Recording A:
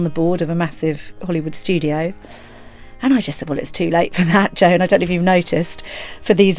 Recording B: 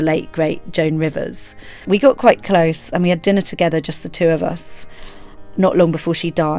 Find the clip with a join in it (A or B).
B